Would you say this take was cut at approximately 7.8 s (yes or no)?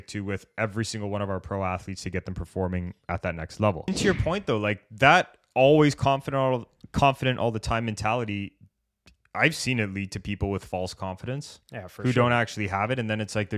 no